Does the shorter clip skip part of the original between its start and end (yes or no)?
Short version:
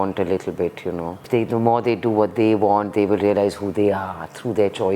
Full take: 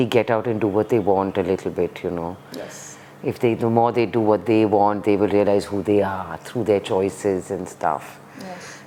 yes